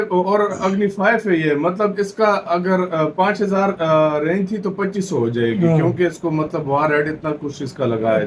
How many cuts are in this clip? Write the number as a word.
zero